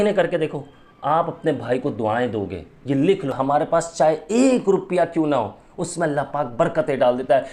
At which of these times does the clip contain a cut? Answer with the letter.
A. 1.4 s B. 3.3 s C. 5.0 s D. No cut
B